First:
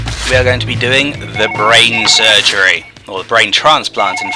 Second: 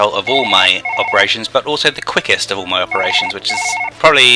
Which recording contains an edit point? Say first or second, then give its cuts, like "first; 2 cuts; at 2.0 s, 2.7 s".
second; 1 cut; at 1.0 s